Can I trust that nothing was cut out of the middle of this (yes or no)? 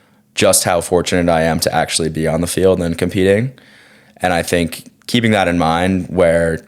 yes